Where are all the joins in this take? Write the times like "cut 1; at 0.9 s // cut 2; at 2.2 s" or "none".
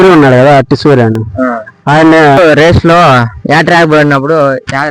cut 1; at 2.2 s